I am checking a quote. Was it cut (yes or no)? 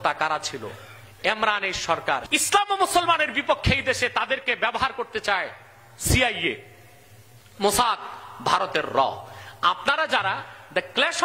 yes